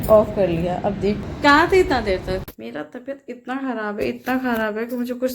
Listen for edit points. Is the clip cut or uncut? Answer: cut